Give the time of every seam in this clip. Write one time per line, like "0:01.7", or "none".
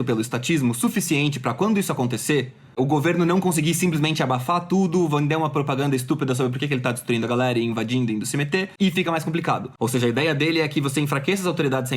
0:08.7
0:09.7